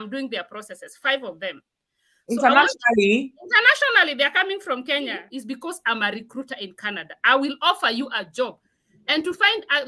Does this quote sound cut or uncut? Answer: cut